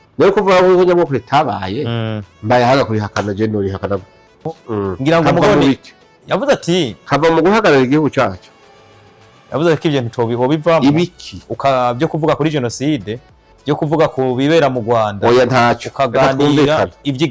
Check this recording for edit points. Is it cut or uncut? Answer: cut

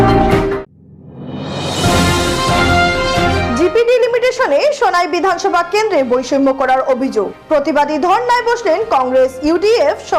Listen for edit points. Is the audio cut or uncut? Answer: uncut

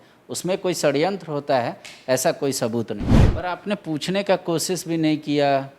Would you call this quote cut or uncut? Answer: cut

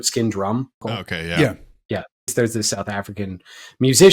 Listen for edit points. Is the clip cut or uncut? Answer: cut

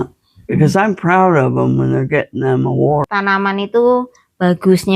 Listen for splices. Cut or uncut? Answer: cut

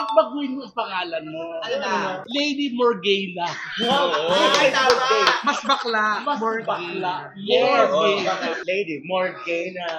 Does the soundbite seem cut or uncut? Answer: uncut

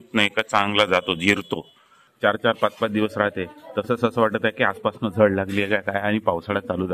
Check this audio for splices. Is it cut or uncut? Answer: cut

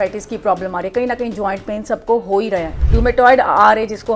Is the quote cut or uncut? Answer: cut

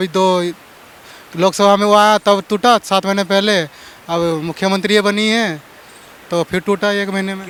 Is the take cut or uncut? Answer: uncut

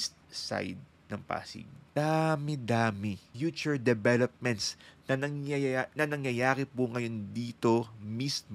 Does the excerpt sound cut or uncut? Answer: cut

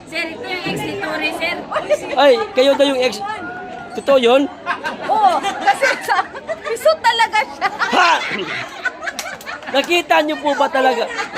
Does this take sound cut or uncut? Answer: uncut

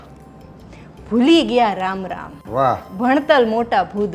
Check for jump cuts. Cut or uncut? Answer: cut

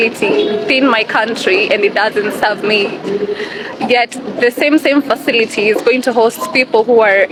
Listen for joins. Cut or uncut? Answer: uncut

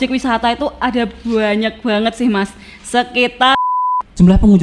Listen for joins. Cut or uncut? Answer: cut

